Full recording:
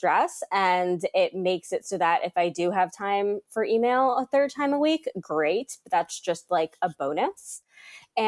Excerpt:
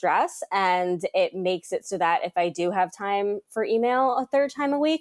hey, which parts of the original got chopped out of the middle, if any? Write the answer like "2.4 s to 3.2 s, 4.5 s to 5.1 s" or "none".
none